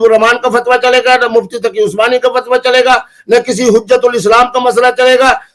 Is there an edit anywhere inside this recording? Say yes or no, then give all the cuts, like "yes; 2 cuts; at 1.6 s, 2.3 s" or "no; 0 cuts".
no; 0 cuts